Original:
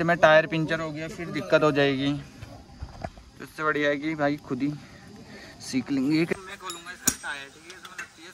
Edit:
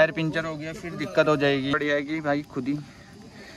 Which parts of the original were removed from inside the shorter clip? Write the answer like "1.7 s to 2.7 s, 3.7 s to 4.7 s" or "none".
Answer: 2.1 s to 3.7 s